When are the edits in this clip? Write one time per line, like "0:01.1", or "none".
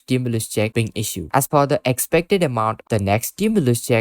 0:01.2
0:02.8